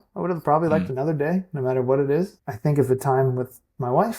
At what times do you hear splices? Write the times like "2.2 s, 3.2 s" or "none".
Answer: 2.4 s